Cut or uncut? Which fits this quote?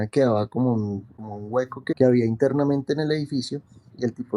cut